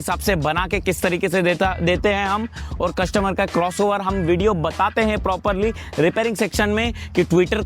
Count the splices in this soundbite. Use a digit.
0